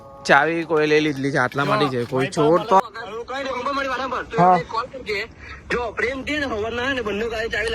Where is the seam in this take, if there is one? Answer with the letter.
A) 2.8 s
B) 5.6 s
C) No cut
A